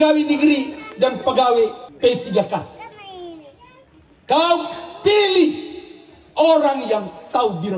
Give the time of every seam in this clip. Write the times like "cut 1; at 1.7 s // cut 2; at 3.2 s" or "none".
cut 1; at 1.8 s